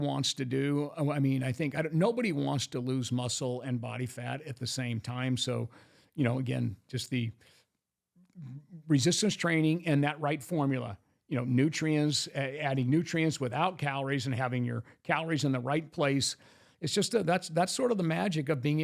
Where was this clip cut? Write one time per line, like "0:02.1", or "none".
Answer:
none